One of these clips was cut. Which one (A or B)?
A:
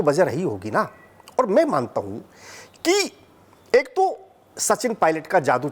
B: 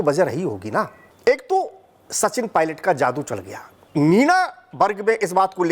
B